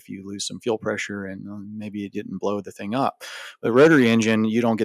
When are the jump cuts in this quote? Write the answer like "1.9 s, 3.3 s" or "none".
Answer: none